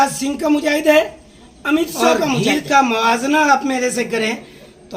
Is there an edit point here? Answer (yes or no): yes